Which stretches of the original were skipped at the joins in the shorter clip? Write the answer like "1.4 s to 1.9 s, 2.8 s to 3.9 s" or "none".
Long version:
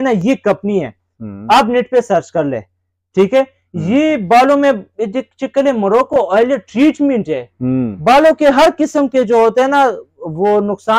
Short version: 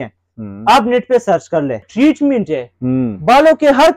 2.7 s to 6.7 s